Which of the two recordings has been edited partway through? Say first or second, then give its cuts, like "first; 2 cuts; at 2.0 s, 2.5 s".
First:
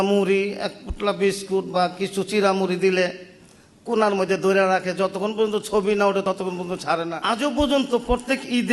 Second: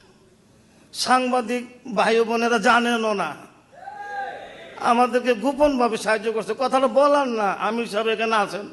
first; 1 cut; at 7.2 s